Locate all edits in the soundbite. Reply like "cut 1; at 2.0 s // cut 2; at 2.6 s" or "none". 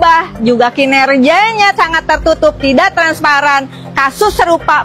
none